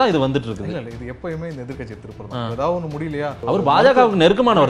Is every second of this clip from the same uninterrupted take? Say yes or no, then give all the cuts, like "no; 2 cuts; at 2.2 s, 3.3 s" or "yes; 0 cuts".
no; 1 cut; at 3.4 s